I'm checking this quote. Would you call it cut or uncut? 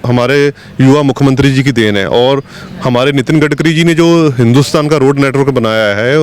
uncut